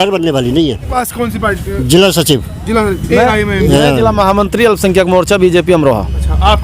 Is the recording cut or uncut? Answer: cut